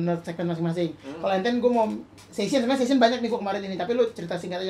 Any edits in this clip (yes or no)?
no